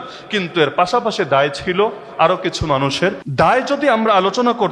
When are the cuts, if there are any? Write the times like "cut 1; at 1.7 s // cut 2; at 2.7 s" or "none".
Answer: cut 1; at 3.2 s